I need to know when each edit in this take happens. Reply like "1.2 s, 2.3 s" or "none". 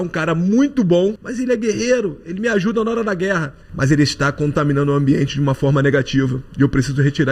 1.3 s, 3.6 s